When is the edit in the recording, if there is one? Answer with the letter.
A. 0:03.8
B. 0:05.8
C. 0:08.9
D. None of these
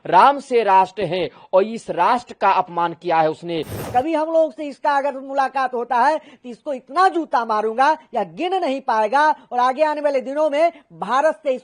A